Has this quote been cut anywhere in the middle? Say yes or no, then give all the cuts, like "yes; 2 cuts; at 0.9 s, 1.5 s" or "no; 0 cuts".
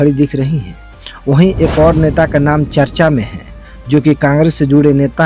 no; 0 cuts